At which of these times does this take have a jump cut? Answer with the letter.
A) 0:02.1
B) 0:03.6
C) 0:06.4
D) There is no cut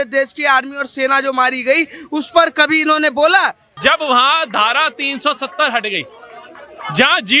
B